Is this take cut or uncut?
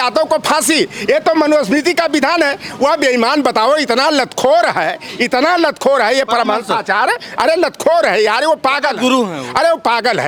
uncut